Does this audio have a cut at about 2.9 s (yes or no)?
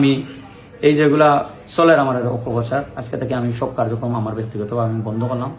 no